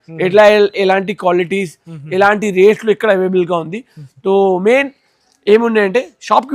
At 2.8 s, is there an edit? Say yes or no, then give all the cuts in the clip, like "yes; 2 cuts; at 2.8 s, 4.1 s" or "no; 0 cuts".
no; 0 cuts